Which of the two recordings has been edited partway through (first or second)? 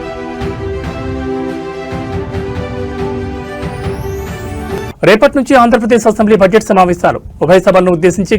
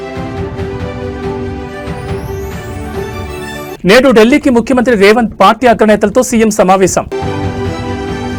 first